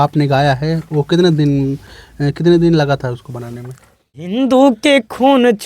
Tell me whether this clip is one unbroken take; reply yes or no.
no